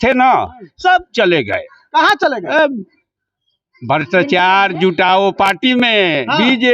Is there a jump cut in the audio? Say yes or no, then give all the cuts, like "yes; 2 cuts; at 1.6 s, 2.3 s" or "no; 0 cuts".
no; 0 cuts